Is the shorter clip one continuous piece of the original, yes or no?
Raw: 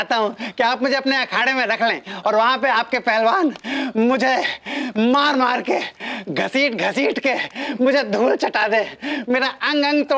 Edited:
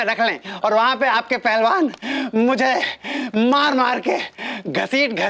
yes